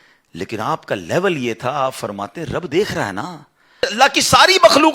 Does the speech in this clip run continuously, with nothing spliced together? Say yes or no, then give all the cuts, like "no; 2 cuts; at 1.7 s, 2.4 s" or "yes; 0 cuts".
no; 1 cut; at 3.9 s